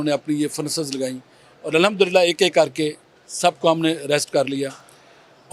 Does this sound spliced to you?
no; 0 cuts

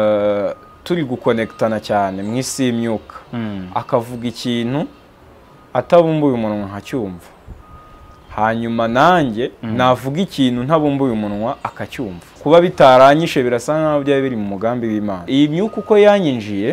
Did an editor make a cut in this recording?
yes; 2 cuts; at 12.3 s, 15.2 s

